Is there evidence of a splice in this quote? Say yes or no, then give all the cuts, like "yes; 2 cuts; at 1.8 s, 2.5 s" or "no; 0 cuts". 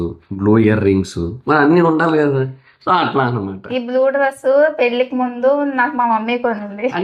no; 0 cuts